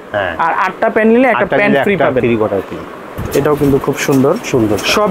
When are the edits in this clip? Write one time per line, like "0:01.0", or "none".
0:03.2